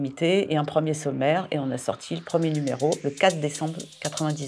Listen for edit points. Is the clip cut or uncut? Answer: uncut